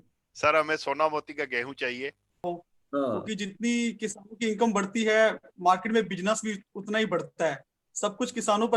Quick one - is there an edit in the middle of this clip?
yes; 1 cut; at 2.4 s

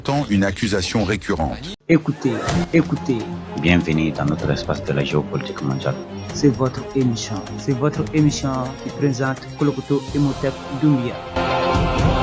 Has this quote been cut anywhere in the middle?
yes; 1 cut; at 1.7 s

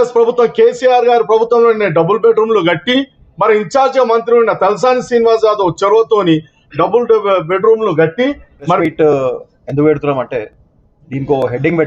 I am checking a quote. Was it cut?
yes; 1 cut; at 8.8 s

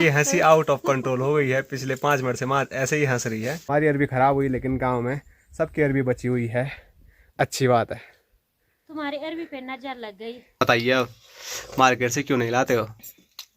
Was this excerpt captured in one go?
no; 2 cuts; at 3.6 s, 10.6 s

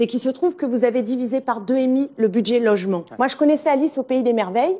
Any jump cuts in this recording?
yes; 1 cut; at 3.1 s

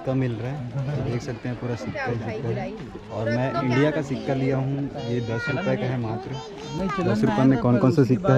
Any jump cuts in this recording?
no; 0 cuts

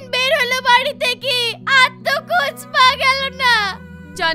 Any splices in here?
no; 0 cuts

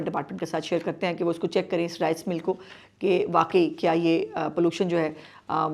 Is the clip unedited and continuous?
yes; 0 cuts

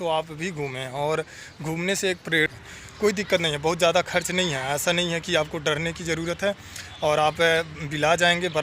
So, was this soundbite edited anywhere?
yes; 1 cut; at 2.5 s

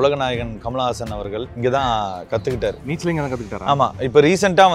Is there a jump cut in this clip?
yes; 2 cuts; at 1.5 s, 2.9 s

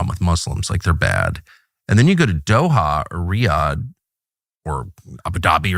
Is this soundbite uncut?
yes; 0 cuts

